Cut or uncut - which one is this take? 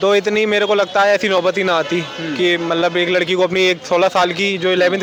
uncut